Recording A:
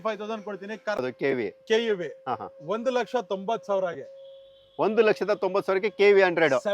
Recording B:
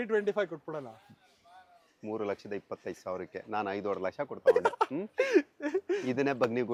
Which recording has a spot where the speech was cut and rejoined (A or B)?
A